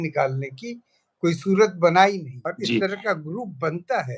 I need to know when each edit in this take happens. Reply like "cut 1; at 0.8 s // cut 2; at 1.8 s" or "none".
cut 1; at 2.3 s